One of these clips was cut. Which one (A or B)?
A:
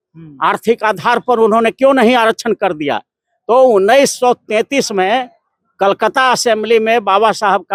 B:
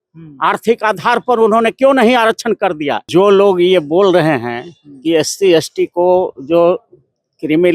B